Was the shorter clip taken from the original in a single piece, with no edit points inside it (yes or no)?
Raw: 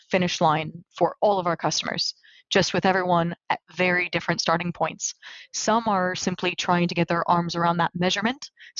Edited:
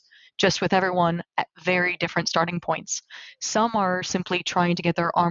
yes